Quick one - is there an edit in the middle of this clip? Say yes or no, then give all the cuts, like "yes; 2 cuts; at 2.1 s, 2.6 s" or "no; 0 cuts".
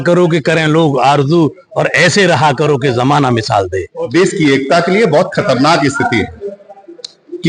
yes; 1 cut; at 4.0 s